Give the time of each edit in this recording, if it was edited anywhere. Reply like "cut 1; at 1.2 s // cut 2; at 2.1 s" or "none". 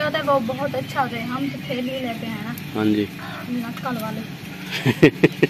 none